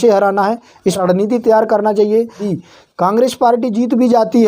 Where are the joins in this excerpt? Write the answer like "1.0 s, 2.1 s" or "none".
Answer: 1.0 s, 2.5 s